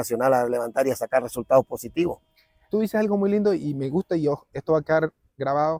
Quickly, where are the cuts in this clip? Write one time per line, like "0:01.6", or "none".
none